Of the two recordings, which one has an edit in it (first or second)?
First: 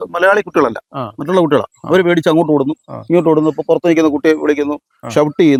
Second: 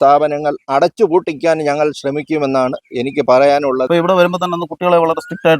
second